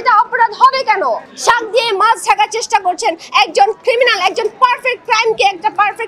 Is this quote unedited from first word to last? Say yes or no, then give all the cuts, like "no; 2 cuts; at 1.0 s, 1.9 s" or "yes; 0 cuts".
no; 1 cut; at 1.3 s